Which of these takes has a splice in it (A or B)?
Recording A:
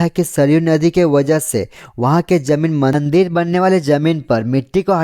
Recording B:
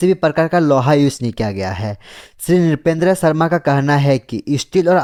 A